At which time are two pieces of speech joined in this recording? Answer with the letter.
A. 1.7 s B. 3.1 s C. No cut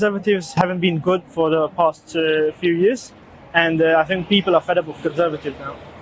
C